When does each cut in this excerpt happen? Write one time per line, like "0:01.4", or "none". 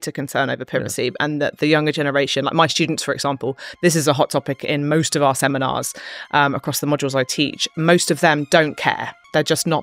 none